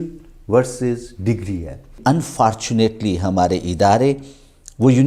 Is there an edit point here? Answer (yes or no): yes